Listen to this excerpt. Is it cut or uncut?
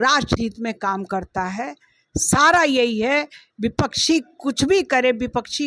uncut